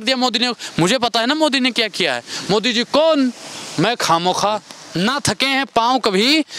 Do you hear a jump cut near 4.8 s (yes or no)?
yes